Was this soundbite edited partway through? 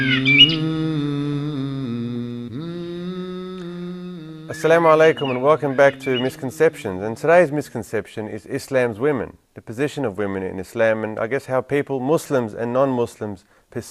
yes; 1 cut; at 11.1 s

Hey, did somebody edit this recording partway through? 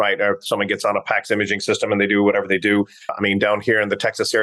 yes; 1 cut; at 3.1 s

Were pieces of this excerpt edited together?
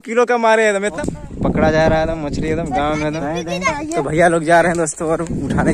yes; 2 cuts; at 0.9 s, 3.7 s

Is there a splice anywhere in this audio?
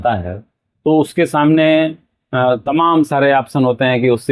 no; 0 cuts

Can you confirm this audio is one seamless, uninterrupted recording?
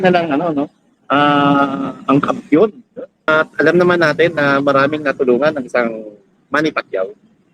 no; 1 cut; at 3.3 s

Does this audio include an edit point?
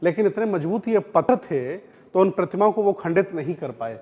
yes; 1 cut; at 1.2 s

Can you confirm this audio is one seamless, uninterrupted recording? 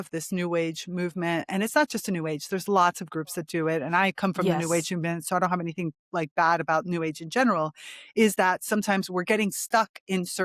yes; 0 cuts

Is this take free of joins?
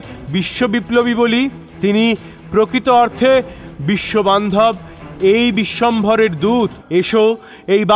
no; 2 cuts; at 1.6 s, 6.8 s

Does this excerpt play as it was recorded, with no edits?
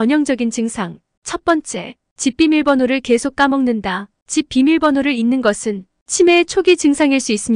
no; 1 cut; at 1.0 s

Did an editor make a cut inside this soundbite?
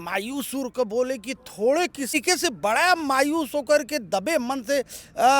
yes; 1 cut; at 2.1 s

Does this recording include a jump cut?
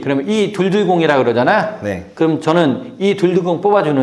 no; 0 cuts

